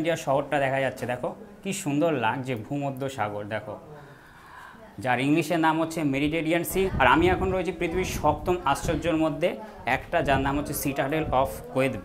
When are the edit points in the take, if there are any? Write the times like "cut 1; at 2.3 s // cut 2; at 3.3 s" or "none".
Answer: none

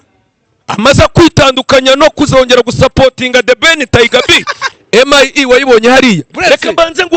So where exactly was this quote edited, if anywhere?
cut 1; at 4.6 s // cut 2; at 6.3 s

